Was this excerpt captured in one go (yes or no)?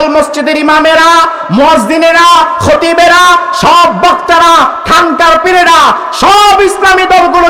yes